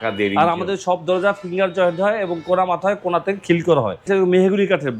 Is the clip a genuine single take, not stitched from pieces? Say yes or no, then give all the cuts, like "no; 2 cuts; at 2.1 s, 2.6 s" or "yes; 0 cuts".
no; 1 cut; at 4.0 s